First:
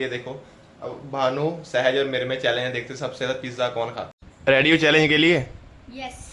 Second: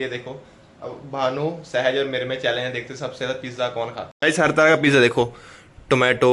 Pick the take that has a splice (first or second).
first